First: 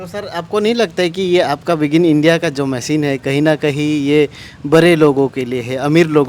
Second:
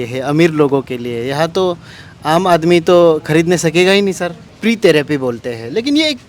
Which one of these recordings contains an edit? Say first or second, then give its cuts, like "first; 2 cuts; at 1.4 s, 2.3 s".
second; 1 cut; at 4.5 s